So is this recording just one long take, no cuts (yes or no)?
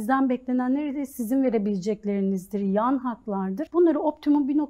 no